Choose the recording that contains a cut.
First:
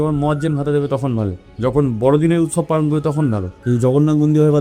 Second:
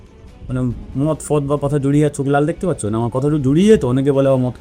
first; 2 cuts; at 1.4 s, 3.5 s

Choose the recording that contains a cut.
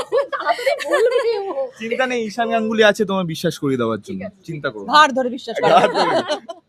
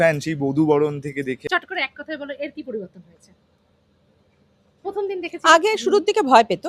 second; 1 cut; at 1.4 s

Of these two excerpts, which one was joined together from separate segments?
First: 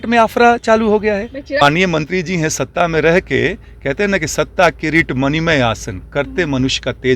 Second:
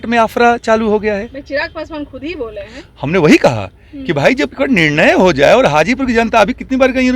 first; 1 cut; at 1.6 s

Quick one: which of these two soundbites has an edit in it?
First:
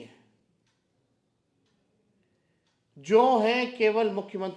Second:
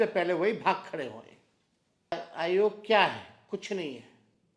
second; 1 cut; at 2.1 s

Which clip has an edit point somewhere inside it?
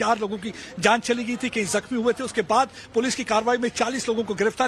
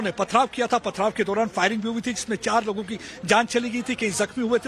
second; 1 cut; at 1.1 s

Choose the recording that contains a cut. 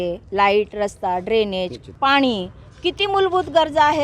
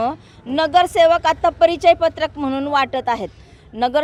first; 1 cut; at 1.9 s

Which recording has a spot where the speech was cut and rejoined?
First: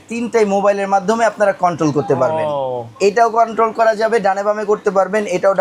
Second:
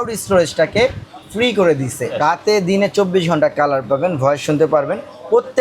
second; 1 cut; at 2.2 s

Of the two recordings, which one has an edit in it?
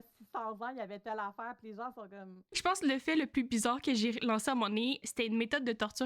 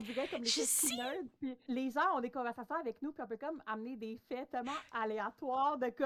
first; 2 cuts; at 2.5 s, 5.0 s

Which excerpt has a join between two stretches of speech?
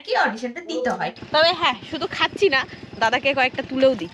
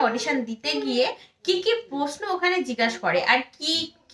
first; 1 cut; at 1.2 s

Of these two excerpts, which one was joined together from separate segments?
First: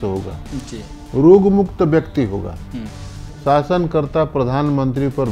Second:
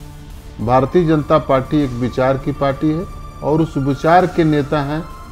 first; 1 cut; at 3.3 s

